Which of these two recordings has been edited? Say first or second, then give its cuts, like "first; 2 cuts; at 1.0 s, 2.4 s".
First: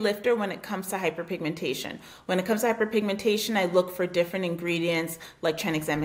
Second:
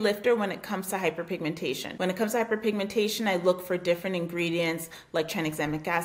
second; 1 cut; at 1.9 s